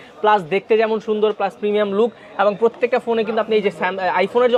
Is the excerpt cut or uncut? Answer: uncut